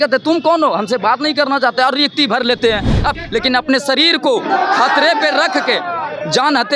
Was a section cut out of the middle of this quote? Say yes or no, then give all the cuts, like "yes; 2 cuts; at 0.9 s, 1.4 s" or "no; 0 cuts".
yes; 1 cut; at 3.1 s